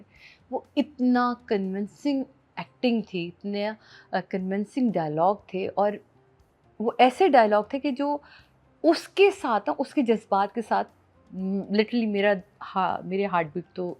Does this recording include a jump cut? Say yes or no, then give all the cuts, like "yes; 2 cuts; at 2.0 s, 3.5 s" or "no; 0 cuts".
no; 0 cuts